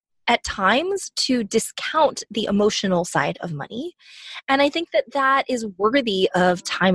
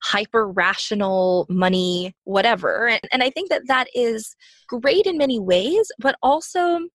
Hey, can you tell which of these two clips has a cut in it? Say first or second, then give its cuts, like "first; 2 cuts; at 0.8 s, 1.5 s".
second; 2 cuts; at 2.2 s, 3.0 s